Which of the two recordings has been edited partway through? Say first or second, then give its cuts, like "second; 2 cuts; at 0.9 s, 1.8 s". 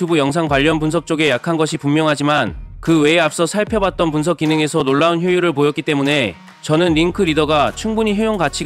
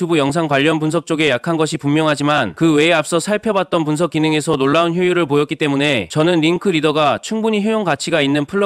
second; 2 cuts; at 2.5 s, 6.0 s